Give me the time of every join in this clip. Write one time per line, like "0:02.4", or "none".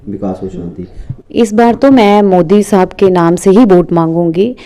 0:00.9